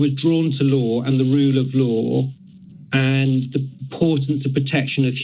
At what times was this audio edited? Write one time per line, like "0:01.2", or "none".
none